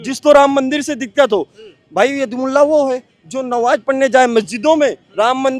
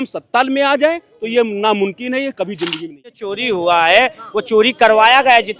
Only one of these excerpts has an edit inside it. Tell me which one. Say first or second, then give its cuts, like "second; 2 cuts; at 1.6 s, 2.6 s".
second; 1 cut; at 3.3 s